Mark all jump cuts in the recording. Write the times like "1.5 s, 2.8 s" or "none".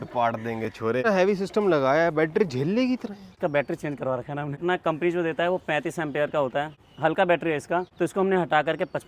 1.1 s, 3.4 s, 4.6 s, 6.8 s, 7.9 s